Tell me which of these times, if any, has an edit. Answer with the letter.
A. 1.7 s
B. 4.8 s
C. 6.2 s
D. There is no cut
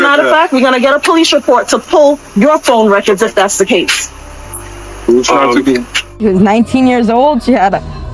C